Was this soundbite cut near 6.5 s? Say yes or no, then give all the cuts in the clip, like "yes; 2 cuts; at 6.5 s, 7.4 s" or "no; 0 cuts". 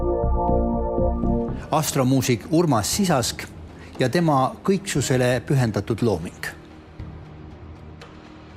no; 1 cut; at 1.5 s